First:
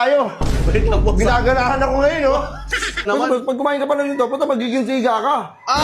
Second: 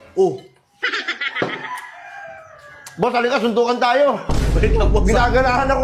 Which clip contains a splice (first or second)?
first